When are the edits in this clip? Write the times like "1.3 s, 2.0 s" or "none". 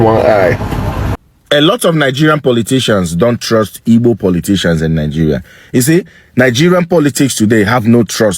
1.1 s